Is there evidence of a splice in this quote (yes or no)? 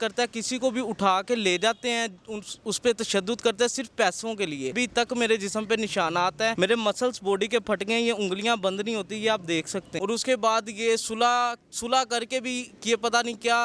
yes